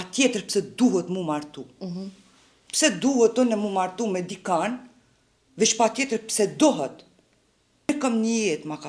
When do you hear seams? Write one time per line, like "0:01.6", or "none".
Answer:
0:07.9